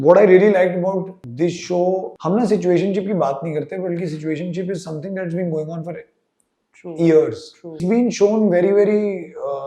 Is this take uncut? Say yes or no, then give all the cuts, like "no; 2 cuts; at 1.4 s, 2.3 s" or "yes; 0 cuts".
no; 3 cuts; at 1.2 s, 2.1 s, 7.8 s